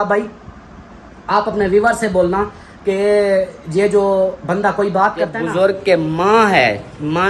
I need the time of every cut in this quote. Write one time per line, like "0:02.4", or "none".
0:05.4